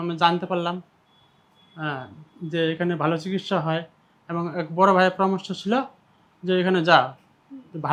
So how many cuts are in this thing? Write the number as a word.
zero